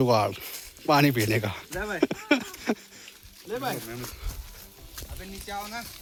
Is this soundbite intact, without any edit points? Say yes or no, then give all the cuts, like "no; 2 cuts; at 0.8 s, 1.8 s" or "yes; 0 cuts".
yes; 0 cuts